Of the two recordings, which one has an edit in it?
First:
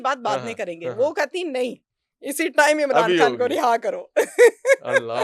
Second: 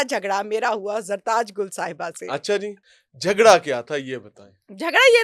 second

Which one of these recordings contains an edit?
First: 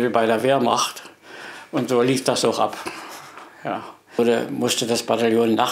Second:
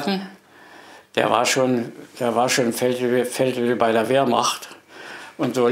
first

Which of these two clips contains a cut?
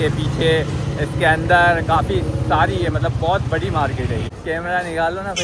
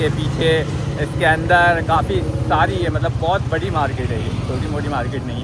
first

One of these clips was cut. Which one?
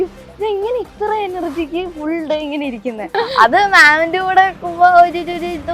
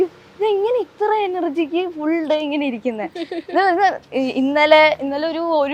first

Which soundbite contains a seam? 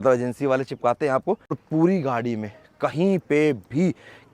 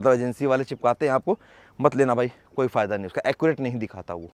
first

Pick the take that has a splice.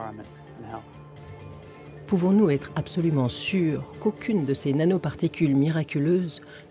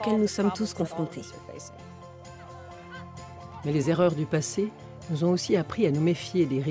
second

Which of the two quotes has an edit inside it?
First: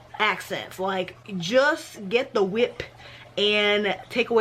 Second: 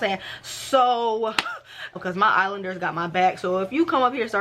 second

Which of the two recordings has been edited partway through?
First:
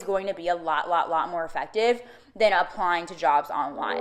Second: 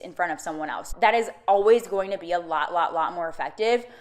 second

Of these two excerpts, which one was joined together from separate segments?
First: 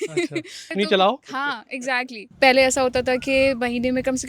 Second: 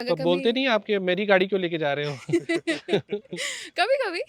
first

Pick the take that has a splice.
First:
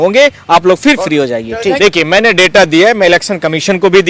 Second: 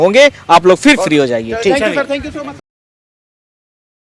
first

